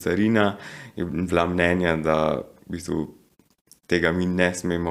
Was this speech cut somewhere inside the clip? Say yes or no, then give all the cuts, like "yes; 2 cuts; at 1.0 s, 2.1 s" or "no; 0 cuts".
no; 0 cuts